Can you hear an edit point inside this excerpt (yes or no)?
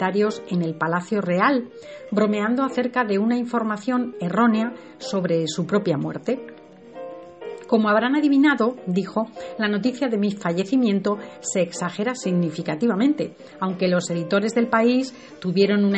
yes